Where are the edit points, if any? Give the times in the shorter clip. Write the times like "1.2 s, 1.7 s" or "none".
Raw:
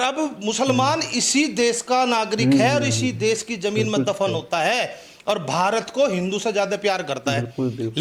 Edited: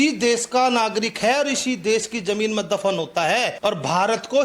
3.5 s